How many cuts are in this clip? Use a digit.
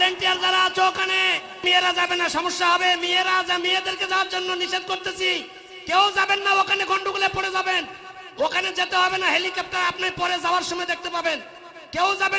1